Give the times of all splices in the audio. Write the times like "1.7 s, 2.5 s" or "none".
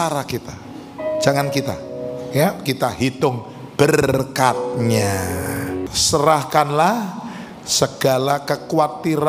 5.8 s